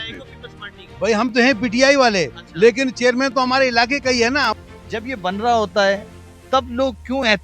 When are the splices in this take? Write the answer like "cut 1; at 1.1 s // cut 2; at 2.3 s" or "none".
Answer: cut 1; at 4.5 s